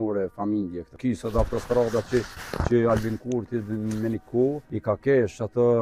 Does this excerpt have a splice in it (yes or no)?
yes